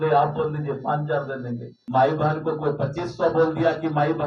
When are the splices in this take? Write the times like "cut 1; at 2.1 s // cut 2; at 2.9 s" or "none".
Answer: cut 1; at 1.7 s